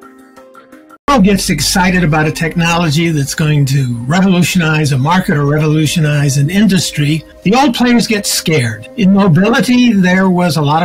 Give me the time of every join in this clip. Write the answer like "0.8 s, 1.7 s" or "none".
1.1 s